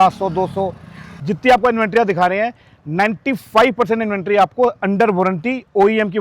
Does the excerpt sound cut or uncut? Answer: cut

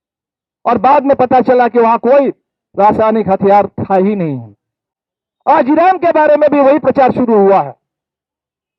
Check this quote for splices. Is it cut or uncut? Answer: uncut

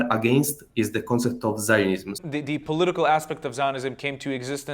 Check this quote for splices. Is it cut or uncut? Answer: cut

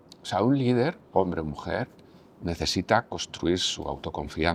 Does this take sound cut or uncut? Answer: uncut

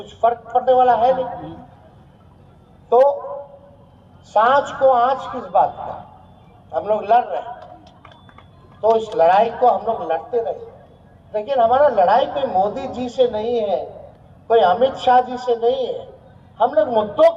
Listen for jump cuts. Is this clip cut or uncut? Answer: uncut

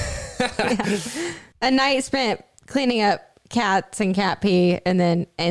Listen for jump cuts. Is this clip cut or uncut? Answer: cut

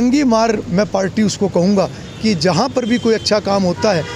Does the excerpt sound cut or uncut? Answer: uncut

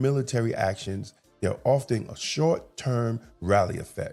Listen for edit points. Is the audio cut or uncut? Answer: uncut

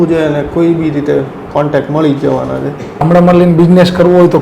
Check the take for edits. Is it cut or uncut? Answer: cut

